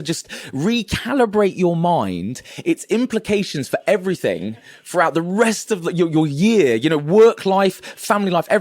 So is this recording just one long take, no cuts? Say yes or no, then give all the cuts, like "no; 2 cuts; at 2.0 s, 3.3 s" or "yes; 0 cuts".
yes; 0 cuts